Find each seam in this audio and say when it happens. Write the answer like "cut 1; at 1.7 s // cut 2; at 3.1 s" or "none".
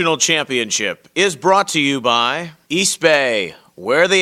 cut 1; at 2.5 s